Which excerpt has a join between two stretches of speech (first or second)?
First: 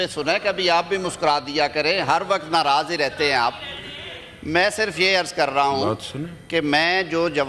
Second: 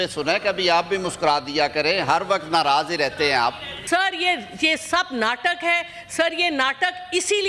second